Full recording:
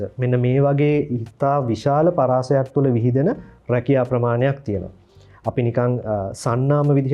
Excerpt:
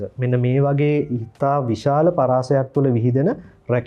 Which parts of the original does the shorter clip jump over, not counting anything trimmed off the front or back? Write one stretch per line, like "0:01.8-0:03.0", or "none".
none